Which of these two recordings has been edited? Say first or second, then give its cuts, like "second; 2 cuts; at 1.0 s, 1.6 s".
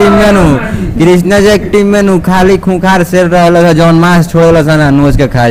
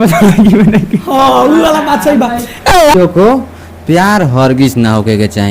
second; 1 cut; at 2.9 s